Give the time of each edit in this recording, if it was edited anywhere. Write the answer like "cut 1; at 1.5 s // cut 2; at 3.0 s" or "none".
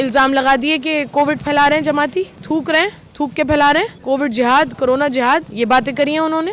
cut 1; at 2.4 s // cut 2; at 4.0 s // cut 3; at 5.5 s

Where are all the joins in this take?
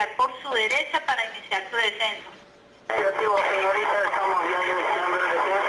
none

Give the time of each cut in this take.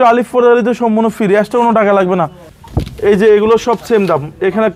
cut 1; at 2.4 s

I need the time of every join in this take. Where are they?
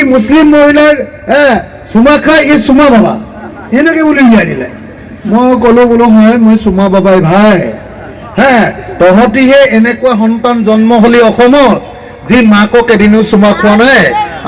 none

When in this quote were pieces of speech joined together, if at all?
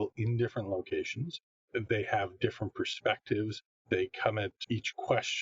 cut 1; at 3.7 s // cut 2; at 4.6 s

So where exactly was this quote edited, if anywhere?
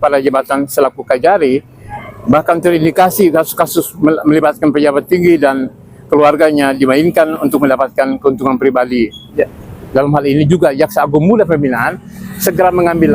cut 1; at 9.3 s

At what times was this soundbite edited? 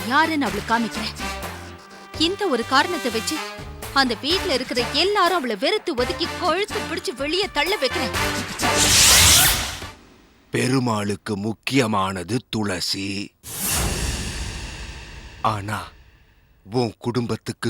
cut 1; at 9.7 s

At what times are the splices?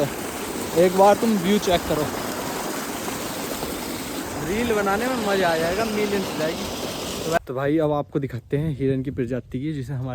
cut 1; at 7.4 s

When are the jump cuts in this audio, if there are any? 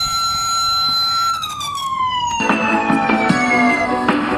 none

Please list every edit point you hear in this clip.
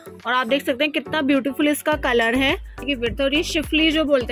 cut 1; at 2.8 s

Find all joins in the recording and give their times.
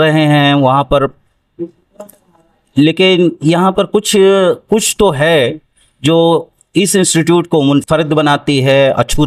none

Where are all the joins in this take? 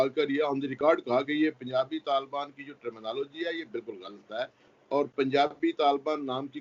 none

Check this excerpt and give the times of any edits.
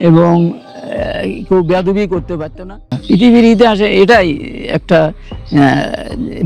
cut 1; at 3.0 s

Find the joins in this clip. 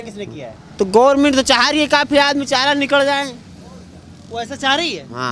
none

